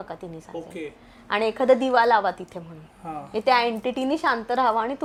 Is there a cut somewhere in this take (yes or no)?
no